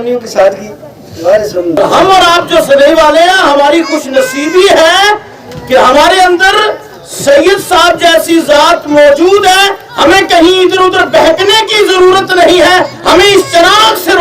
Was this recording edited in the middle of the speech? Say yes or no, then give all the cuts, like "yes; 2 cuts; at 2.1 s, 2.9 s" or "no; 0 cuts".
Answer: yes; 1 cut; at 1.8 s